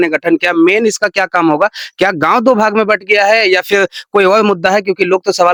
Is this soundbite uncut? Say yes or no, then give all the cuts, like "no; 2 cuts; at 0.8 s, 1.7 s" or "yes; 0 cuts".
yes; 0 cuts